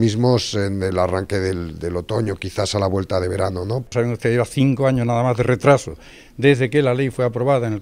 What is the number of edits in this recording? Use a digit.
1